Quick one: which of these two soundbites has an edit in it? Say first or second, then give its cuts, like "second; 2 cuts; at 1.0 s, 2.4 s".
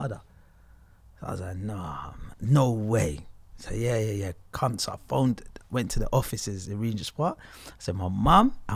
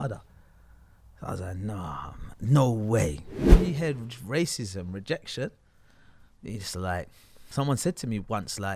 second; 1 cut; at 3.5 s